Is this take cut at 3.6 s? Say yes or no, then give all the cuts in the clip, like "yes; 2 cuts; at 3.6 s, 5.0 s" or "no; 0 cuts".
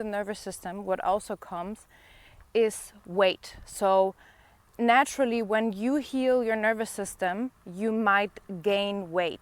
no; 0 cuts